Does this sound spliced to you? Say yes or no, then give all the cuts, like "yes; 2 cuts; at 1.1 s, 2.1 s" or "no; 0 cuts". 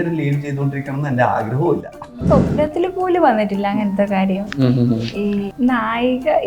yes; 2 cuts; at 2.2 s, 5.5 s